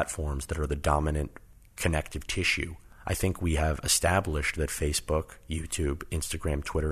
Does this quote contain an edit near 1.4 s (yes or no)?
yes